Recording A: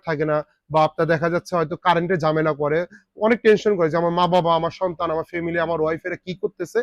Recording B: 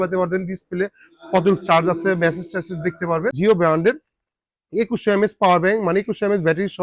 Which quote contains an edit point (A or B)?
B